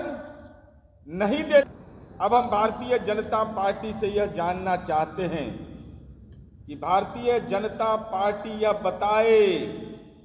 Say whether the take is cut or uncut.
cut